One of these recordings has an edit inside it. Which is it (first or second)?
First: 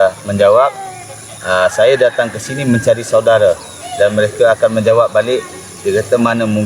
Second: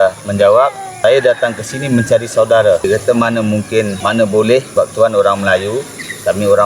second